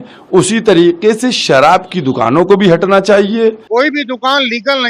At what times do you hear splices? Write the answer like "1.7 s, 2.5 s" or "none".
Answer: 3.6 s